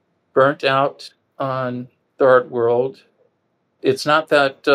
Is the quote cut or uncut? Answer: cut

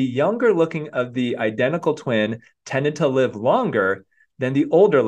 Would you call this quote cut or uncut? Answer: uncut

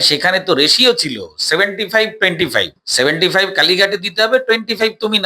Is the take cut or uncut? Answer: cut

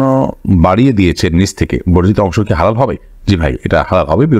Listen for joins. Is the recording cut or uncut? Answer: uncut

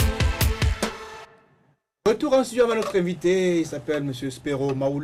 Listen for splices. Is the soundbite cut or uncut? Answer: uncut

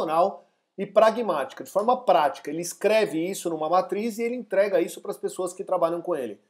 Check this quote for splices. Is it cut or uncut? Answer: uncut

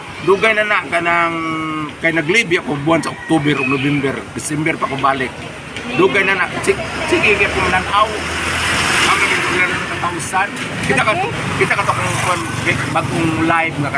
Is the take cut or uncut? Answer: uncut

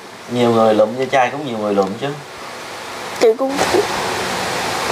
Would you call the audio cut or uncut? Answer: cut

